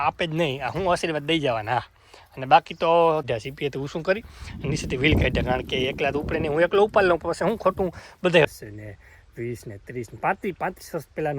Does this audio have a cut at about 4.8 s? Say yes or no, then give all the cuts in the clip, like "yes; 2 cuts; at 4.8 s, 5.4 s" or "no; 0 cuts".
no; 2 cuts; at 3.2 s, 8.4 s